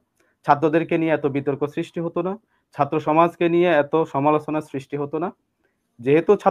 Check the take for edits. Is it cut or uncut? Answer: uncut